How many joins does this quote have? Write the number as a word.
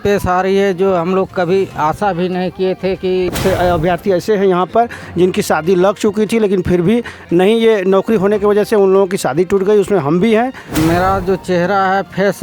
two